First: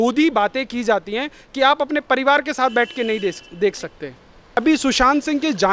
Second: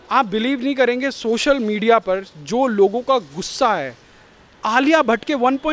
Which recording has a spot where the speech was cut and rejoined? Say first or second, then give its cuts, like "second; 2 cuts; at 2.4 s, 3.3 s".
first; 1 cut; at 4.6 s